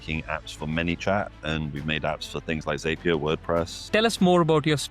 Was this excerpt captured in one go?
no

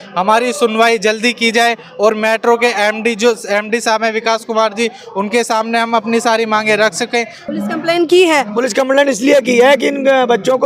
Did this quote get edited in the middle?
yes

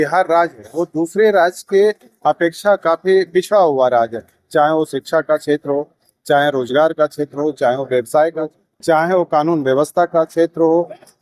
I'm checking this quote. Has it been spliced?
yes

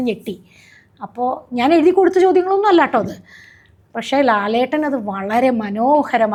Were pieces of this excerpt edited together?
no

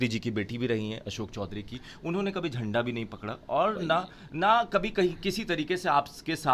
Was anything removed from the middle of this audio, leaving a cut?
no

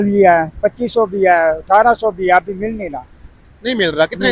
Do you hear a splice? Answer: no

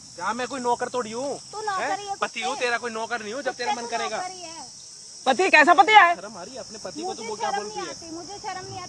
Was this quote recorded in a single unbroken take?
yes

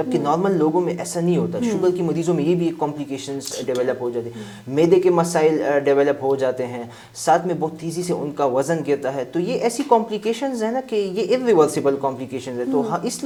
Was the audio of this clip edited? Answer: no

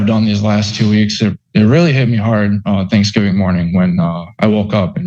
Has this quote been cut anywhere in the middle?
no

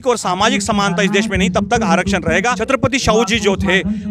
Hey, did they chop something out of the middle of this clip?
yes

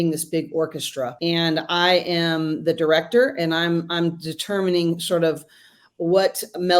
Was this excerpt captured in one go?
no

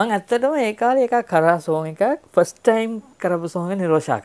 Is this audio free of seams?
no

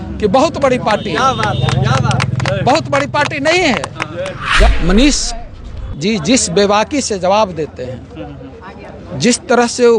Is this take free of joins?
no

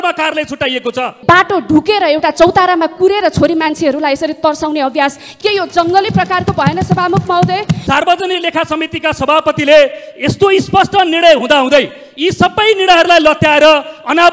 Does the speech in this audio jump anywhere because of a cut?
yes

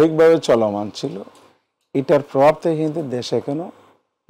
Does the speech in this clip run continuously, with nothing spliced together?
yes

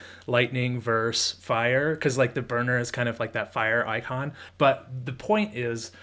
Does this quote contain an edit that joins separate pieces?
yes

